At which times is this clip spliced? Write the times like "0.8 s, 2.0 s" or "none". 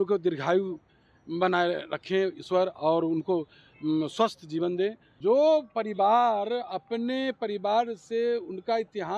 5.1 s